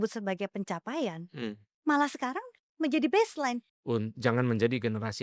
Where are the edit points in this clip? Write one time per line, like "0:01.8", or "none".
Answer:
0:03.7